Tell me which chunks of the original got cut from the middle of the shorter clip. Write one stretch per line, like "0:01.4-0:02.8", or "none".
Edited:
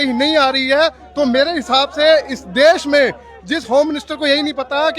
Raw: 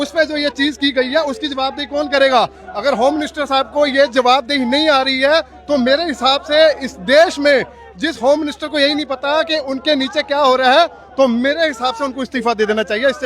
none